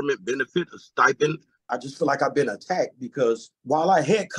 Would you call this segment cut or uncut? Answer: cut